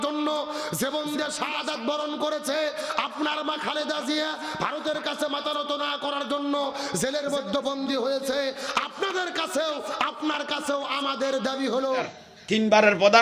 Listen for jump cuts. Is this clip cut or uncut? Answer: cut